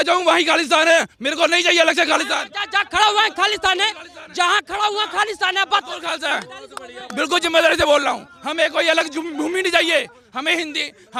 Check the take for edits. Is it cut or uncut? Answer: uncut